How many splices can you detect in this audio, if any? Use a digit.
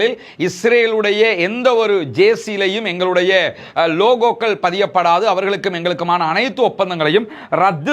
1